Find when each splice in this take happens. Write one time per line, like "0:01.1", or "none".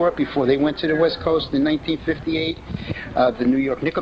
0:02.3